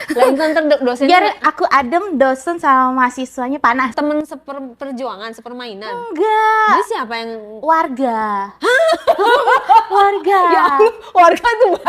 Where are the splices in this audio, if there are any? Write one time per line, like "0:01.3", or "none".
0:03.9